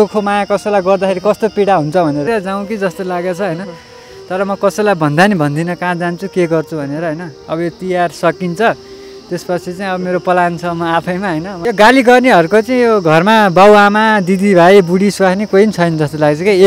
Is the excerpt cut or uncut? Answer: cut